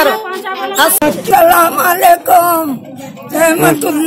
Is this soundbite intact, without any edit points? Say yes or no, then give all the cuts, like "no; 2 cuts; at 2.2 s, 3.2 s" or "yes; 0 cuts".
no; 1 cut; at 1.0 s